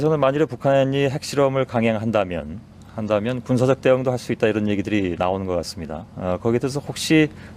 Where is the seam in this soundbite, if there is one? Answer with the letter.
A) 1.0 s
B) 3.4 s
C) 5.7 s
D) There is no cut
C